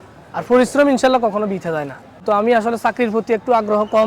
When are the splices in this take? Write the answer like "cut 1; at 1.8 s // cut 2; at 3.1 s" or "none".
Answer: cut 1; at 2.2 s